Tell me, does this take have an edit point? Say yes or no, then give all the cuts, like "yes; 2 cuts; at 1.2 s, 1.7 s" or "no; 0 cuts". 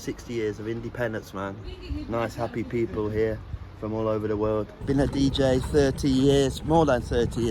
yes; 2 cuts; at 1.7 s, 4.8 s